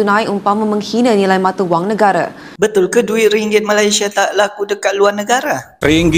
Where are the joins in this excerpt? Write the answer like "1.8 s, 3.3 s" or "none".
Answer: 2.4 s